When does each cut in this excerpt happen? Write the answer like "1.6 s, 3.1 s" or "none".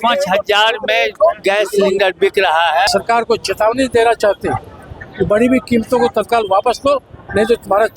2.9 s